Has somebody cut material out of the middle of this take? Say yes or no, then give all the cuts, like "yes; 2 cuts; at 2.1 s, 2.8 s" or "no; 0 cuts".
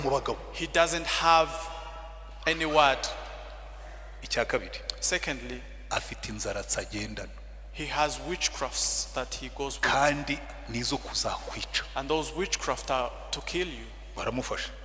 no; 0 cuts